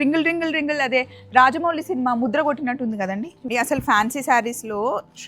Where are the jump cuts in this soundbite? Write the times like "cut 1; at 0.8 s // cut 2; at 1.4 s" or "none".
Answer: cut 1; at 3.5 s